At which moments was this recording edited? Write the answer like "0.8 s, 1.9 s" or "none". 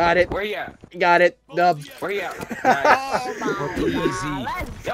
none